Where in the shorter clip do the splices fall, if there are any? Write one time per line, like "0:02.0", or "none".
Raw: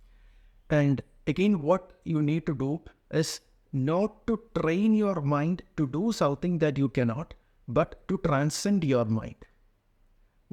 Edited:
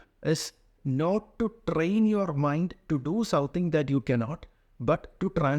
none